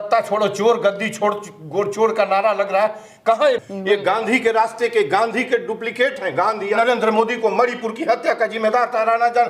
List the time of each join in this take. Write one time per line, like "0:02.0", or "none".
0:03.6
0:06.8